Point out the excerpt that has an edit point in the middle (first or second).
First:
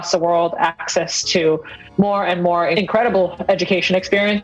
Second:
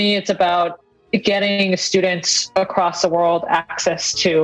first